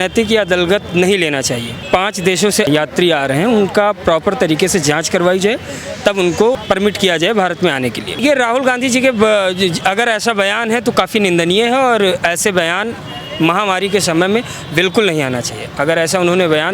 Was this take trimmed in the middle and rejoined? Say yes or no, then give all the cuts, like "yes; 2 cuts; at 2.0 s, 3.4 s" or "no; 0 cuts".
yes; 4 cuts; at 1.8 s, 2.7 s, 6.6 s, 8.2 s